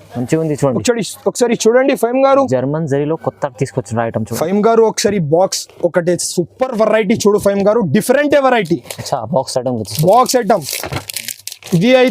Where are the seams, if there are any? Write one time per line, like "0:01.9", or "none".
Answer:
0:04.3